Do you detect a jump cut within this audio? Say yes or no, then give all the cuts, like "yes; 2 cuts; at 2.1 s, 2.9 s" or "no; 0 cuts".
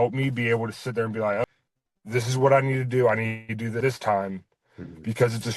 no; 0 cuts